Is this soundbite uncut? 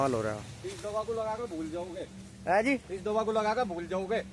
yes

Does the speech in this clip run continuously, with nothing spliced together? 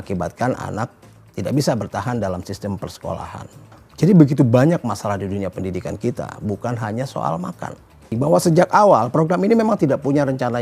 no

